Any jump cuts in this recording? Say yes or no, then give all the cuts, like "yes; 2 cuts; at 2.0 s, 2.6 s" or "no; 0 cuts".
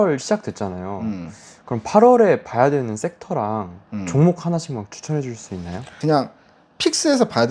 yes; 1 cut; at 6.0 s